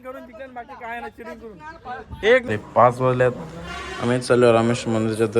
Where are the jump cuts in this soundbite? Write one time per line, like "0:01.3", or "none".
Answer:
0:02.5